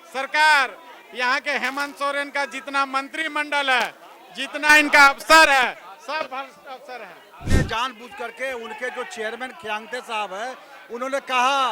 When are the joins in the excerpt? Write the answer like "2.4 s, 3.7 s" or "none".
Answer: 7.7 s